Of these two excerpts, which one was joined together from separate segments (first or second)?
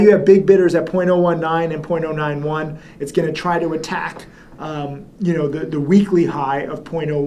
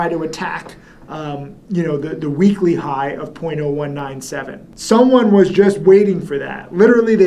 second